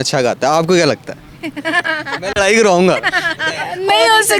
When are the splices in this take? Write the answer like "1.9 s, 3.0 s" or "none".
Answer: none

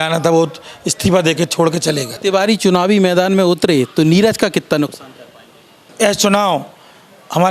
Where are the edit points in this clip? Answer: 2.1 s, 5.8 s

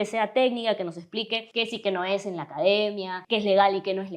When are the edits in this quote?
1.4 s, 3.1 s

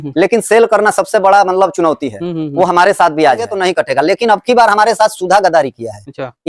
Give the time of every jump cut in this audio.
3.5 s

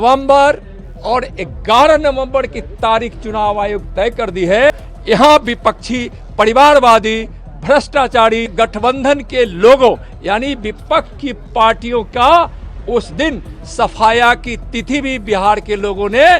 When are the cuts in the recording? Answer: 4.7 s, 8.5 s

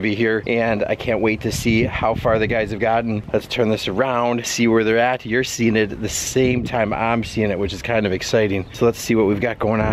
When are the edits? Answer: 3.2 s

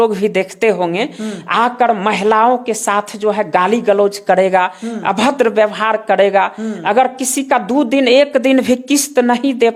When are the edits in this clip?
none

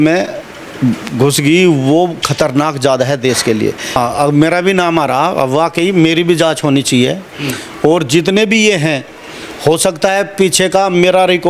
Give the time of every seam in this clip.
4.0 s

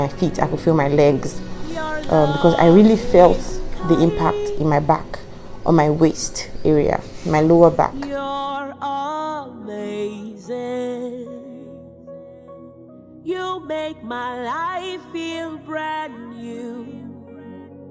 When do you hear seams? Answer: 7.9 s

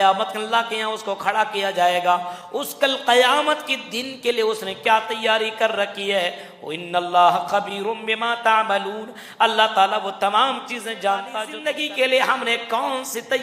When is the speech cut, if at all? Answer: 11.4 s

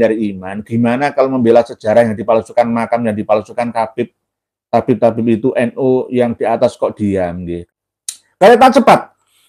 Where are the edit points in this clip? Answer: 7.7 s

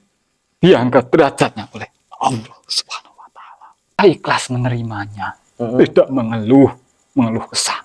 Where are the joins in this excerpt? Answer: 4.0 s

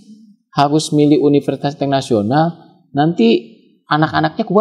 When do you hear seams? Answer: none

